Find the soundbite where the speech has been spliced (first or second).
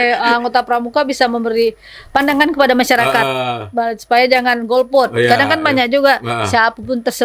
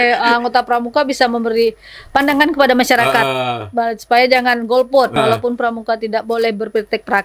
second